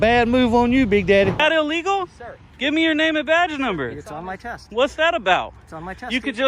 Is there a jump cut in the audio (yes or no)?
yes